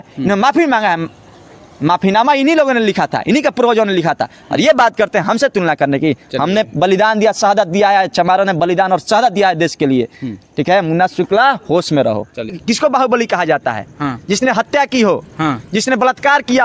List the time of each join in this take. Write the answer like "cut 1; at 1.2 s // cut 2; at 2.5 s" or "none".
cut 1; at 12.5 s